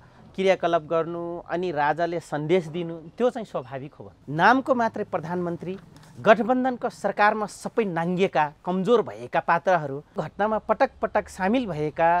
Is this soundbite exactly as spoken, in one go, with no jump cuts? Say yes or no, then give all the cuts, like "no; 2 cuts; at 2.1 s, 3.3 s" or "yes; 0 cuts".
no; 2 cuts; at 4.1 s, 10.2 s